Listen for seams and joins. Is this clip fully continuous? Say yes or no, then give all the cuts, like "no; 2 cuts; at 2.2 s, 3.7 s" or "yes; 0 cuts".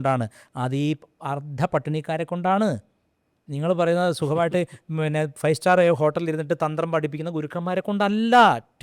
yes; 0 cuts